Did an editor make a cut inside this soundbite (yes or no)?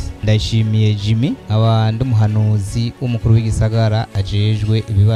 no